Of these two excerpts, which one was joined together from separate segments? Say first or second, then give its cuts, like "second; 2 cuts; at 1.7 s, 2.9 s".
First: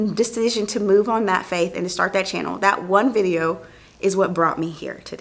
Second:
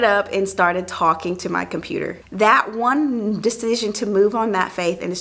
second; 1 cut; at 2.2 s